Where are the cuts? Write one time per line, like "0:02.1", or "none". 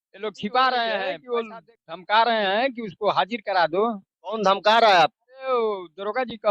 0:01.2